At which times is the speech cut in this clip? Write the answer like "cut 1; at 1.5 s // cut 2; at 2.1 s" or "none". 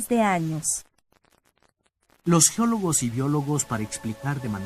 cut 1; at 2.5 s